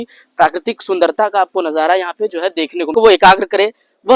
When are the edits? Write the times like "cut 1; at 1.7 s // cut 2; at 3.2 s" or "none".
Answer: cut 1; at 2.9 s